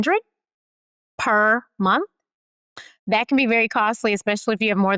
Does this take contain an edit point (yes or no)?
no